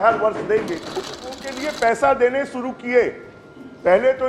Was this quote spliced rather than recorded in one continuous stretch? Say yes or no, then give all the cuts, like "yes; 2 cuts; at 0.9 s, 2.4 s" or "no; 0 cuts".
yes; 1 cut; at 0.9 s